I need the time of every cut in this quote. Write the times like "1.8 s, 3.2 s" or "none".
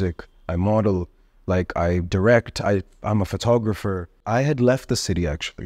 4.2 s